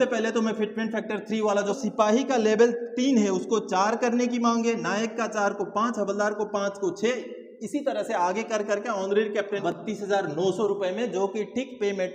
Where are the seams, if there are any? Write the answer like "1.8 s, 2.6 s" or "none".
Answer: 1.8 s, 9.6 s